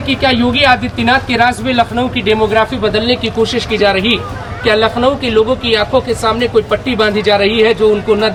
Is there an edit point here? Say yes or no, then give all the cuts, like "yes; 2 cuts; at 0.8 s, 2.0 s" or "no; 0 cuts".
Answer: no; 0 cuts